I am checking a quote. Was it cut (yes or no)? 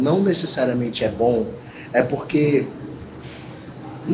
no